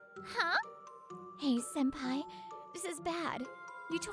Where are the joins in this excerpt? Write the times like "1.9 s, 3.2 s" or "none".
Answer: none